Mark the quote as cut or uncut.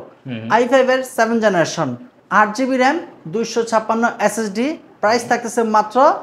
uncut